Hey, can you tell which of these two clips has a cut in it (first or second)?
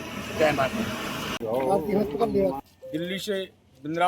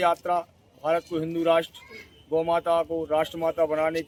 first